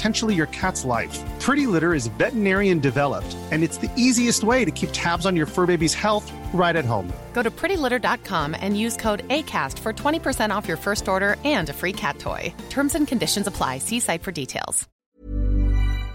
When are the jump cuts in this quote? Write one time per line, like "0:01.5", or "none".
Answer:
0:14.9